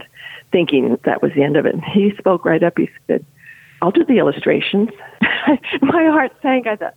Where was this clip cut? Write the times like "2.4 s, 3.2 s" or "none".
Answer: 1.0 s, 5.0 s